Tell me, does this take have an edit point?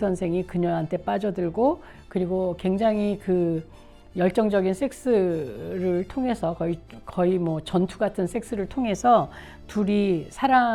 no; 0 cuts

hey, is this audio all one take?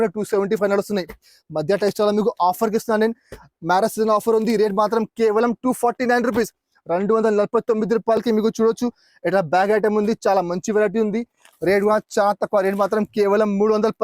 no; 1 cut; at 11.4 s

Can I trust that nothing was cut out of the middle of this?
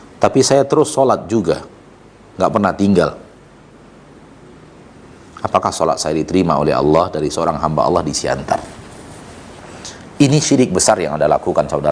yes; 0 cuts

